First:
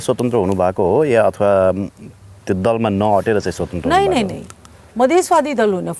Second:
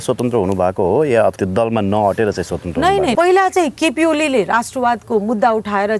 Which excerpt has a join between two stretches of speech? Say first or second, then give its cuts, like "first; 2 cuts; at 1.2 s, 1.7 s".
second; 2 cuts; at 1.3 s, 3.1 s